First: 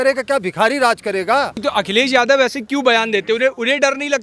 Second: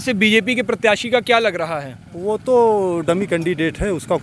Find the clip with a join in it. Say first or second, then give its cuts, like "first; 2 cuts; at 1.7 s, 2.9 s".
first; 1 cut; at 1.6 s